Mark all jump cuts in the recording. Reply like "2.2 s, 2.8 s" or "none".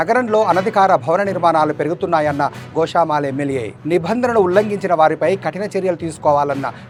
none